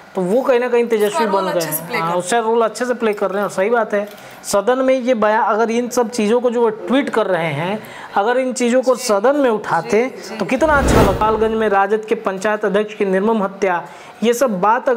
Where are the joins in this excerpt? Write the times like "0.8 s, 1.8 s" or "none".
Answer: 11.2 s